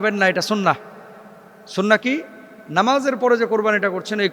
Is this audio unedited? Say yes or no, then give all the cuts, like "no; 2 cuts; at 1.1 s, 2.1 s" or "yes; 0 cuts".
yes; 0 cuts